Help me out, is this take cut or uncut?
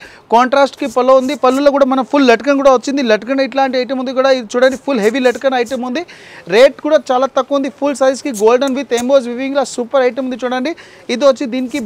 uncut